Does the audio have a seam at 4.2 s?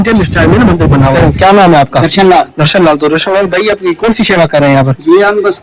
no; 1 cut; at 1.1 s

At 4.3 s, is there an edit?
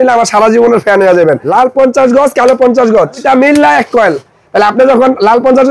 yes; 3 cuts; at 1.4 s, 3.2 s, 4.3 s

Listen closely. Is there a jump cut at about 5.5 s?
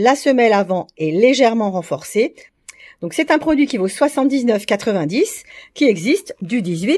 no; 1 cut; at 2.5 s

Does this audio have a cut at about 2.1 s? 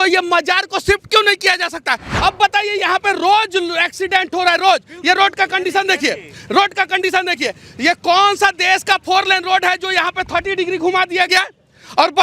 yes; 1 cut; at 2.1 s

